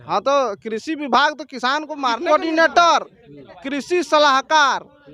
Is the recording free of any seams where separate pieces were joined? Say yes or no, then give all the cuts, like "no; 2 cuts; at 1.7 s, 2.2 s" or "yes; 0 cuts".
no; 1 cut; at 2.2 s